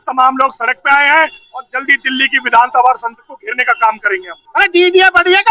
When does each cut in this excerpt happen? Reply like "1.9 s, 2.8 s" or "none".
4.4 s